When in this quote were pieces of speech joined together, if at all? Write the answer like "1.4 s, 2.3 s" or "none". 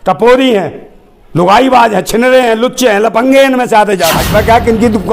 4.2 s